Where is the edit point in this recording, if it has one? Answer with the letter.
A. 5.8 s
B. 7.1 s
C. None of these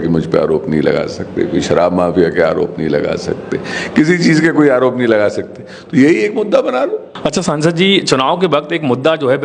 B